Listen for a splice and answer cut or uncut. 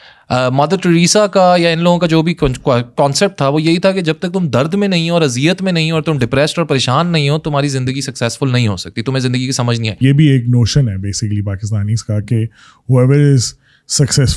cut